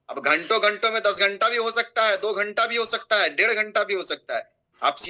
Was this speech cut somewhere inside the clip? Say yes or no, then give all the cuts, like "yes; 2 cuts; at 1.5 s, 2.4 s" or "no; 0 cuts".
no; 0 cuts